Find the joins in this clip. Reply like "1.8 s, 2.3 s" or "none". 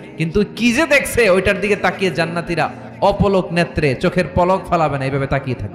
none